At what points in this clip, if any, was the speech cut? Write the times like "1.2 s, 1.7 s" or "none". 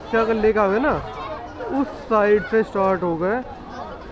none